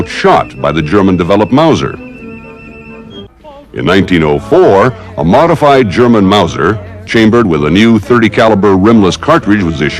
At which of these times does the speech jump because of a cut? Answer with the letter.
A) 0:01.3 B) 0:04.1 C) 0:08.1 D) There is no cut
D